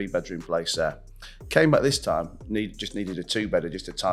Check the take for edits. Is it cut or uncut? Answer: uncut